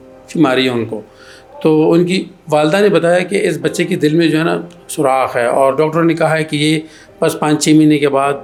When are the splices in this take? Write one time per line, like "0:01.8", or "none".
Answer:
none